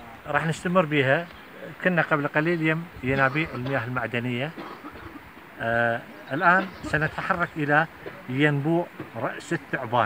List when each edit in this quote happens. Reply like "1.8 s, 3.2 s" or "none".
none